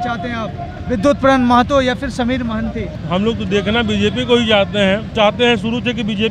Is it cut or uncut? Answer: cut